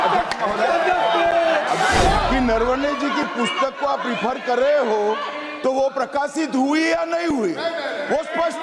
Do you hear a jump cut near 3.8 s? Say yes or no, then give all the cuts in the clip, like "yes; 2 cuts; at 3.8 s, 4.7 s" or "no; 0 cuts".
no; 1 cut; at 2.3 s